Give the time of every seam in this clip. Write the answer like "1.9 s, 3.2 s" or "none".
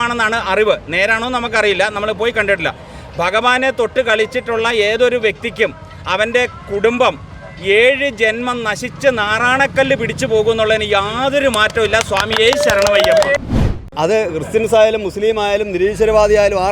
13.4 s